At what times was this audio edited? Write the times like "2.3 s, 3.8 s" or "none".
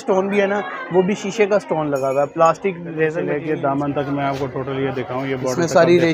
3.4 s